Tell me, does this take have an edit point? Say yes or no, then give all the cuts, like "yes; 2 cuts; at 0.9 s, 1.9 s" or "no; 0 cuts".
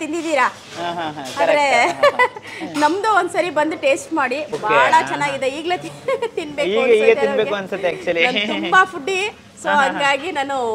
yes; 1 cut; at 4.5 s